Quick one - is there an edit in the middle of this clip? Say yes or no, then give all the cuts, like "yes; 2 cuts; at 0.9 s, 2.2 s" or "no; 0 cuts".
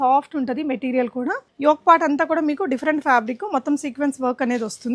yes; 1 cut; at 1.4 s